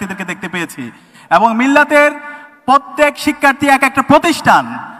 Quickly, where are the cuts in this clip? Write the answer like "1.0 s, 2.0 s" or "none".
none